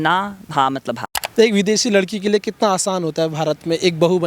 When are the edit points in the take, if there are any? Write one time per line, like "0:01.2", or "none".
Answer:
0:01.1